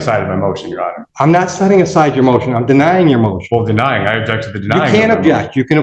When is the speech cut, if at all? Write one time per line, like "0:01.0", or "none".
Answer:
0:01.0